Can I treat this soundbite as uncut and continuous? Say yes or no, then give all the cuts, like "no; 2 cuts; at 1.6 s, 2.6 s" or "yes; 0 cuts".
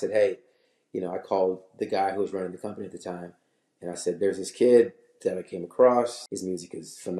no; 1 cut; at 6.2 s